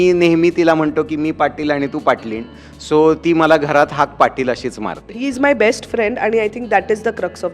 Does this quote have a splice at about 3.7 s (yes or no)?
no